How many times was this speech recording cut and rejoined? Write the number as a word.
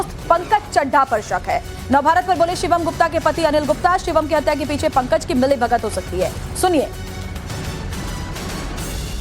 one